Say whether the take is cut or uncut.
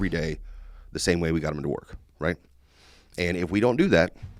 uncut